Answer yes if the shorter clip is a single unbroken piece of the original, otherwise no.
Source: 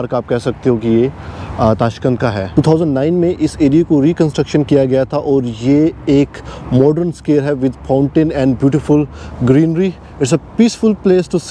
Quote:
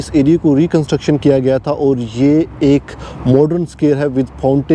yes